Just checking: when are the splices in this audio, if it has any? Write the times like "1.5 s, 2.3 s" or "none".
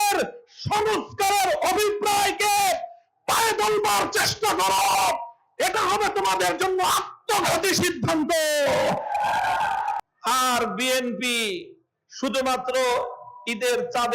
10.0 s